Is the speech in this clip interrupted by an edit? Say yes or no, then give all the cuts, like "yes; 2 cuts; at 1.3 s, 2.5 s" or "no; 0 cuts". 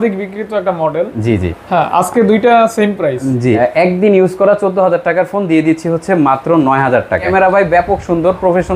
yes; 2 cuts; at 3.6 s, 7.3 s